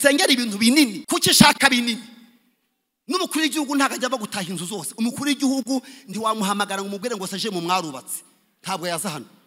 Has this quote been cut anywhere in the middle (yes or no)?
yes